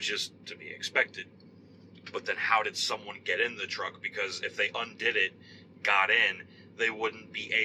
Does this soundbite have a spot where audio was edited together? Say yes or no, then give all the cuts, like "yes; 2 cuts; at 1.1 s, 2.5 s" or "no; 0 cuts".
no; 0 cuts